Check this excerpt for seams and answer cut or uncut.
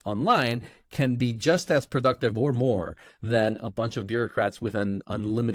uncut